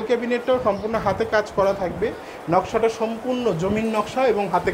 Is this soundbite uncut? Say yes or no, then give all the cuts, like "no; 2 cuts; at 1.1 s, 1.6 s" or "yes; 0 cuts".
yes; 0 cuts